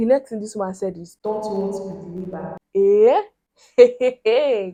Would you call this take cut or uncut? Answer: uncut